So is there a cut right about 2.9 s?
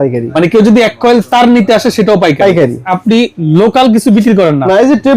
yes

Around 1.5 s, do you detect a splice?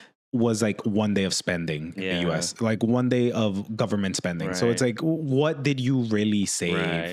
no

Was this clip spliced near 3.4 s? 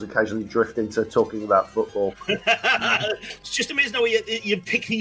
yes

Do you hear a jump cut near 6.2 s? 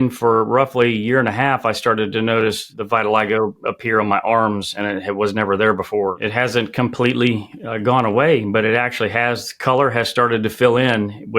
yes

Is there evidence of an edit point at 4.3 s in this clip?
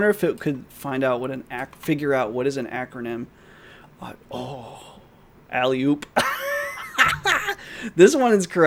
no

